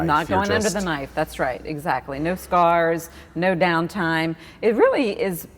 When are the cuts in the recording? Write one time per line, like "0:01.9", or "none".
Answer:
none

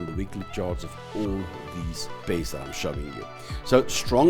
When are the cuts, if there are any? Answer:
0:02.2

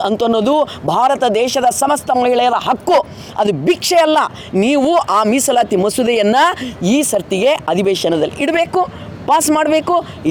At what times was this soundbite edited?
none

